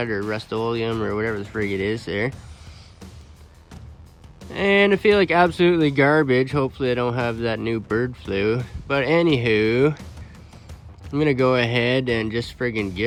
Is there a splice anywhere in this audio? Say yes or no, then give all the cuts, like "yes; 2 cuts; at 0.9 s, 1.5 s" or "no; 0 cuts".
no; 0 cuts